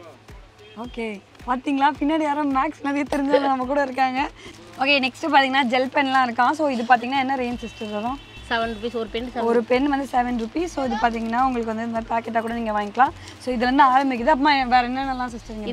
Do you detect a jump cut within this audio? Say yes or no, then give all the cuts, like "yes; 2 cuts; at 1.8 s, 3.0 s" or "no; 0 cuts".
no; 0 cuts